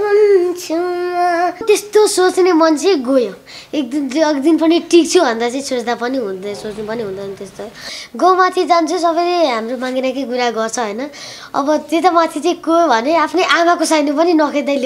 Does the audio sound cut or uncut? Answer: cut